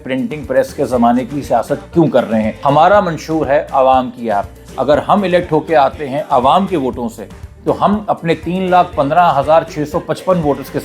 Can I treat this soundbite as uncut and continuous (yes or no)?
no